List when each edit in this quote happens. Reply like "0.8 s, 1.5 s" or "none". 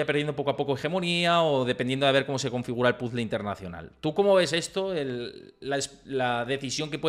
none